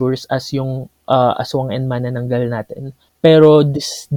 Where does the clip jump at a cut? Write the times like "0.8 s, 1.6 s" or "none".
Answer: 3.0 s